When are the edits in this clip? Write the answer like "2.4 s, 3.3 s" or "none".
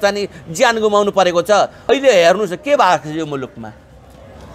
1.9 s